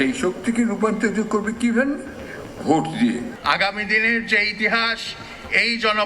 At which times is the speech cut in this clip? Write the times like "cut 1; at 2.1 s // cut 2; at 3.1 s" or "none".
cut 1; at 3.3 s